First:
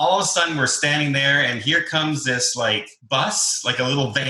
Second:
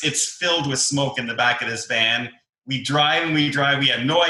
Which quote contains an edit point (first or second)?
first